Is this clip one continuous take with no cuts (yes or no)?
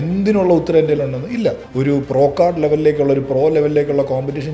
no